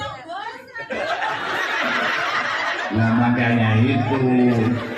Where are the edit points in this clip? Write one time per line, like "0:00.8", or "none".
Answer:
none